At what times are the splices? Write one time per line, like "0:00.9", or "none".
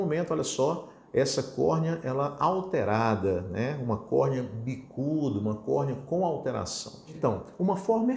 0:07.0